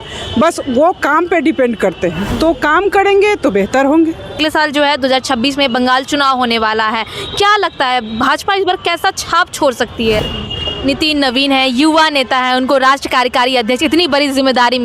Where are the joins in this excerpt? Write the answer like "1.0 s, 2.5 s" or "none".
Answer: 2.3 s, 4.4 s, 10.4 s

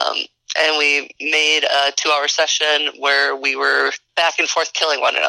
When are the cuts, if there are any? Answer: 4.0 s

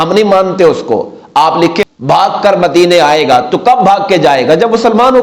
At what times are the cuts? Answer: 1.9 s

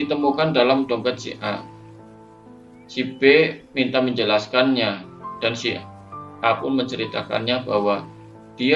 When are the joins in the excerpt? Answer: 1.6 s, 2.9 s

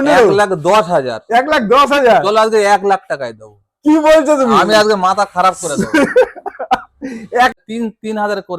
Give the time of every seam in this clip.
7.5 s

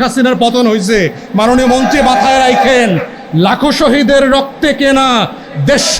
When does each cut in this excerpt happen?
none

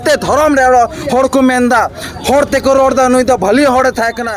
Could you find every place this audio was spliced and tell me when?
none

